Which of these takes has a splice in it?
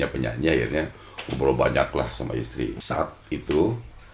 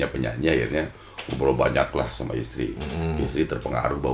first; 1 cut; at 2.8 s

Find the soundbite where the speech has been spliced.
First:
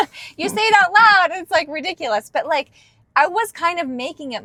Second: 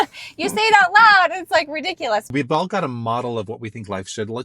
second; 1 cut; at 2.3 s

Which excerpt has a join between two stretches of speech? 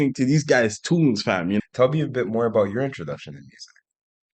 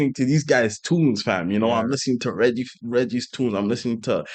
first; 1 cut; at 1.6 s

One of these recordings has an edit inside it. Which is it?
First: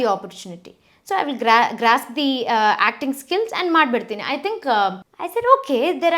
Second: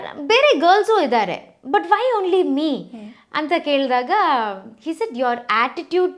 first; 1 cut; at 5.1 s

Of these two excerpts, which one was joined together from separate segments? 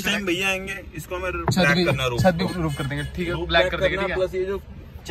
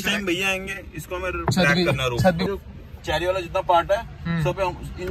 second; 1 cut; at 2.5 s

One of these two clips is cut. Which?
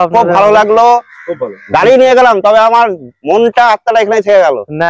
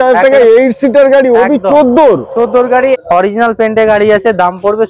second; 1 cut; at 3.0 s

